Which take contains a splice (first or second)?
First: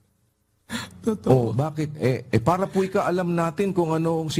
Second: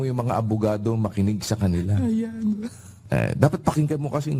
second